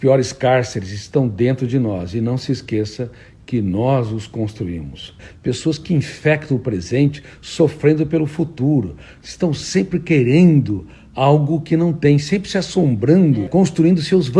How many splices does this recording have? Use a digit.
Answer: 2